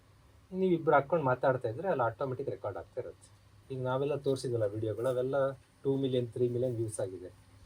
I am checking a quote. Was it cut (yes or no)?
yes